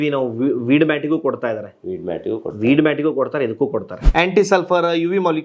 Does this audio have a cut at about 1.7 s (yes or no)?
no